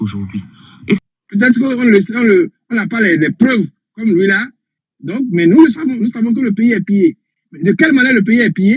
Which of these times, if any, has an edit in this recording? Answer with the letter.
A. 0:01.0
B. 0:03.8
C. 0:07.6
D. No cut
A